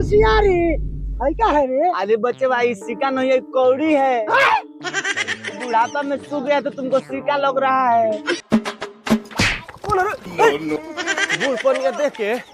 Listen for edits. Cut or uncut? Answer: cut